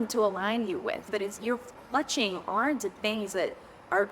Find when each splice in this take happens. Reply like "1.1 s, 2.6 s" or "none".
1.1 s